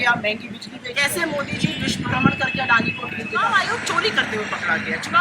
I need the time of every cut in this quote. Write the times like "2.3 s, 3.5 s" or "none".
0.9 s, 3.4 s